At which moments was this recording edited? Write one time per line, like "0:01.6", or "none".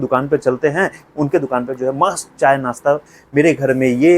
0:03.2